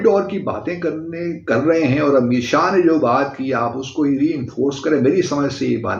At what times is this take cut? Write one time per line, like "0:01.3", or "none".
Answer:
none